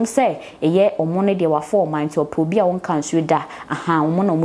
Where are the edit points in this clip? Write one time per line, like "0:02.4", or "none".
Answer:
none